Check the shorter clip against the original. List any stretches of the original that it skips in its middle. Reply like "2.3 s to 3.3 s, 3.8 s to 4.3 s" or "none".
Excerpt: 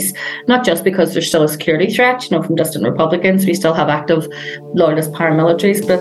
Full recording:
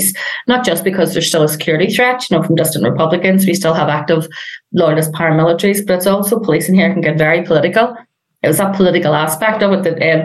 none